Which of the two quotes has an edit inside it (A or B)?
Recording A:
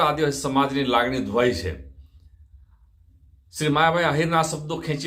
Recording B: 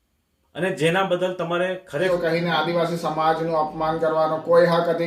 B